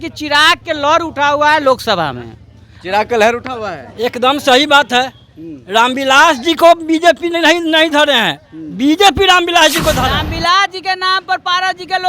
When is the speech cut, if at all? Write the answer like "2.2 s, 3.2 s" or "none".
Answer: 10.1 s